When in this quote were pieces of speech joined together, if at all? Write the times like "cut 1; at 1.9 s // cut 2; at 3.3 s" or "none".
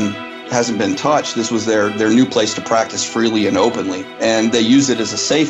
cut 1; at 4.0 s